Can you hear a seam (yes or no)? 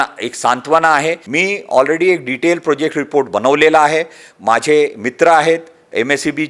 yes